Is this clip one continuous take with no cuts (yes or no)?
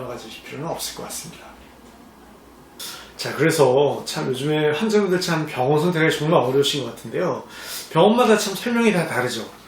yes